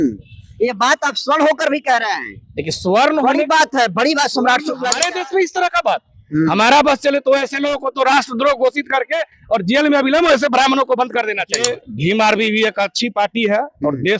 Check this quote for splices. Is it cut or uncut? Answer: cut